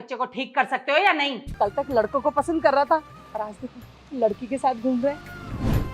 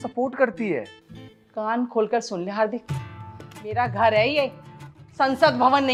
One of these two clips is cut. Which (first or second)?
first